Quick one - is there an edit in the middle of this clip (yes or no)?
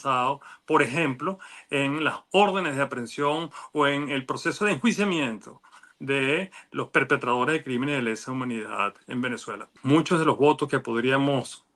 yes